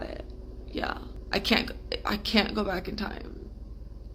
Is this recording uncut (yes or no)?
no